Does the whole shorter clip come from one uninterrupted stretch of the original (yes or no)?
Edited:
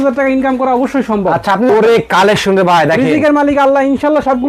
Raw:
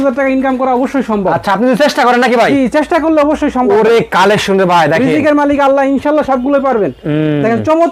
no